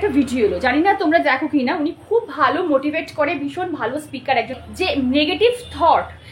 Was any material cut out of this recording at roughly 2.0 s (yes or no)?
no